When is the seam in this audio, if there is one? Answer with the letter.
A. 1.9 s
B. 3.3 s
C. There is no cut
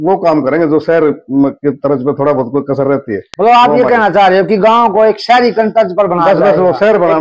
C